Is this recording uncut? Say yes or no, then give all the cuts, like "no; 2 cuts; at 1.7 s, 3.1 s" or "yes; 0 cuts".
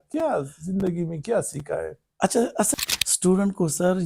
no; 1 cut; at 2.7 s